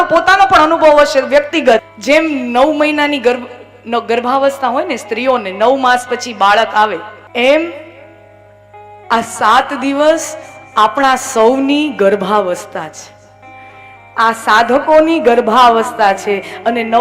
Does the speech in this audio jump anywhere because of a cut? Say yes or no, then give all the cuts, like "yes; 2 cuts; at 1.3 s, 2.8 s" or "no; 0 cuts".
yes; 2 cuts; at 1.9 s, 7.2 s